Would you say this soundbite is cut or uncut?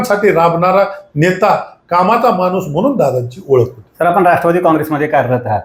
uncut